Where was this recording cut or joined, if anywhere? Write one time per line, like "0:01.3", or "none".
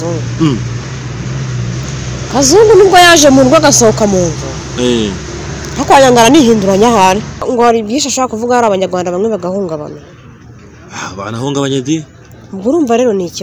0:07.5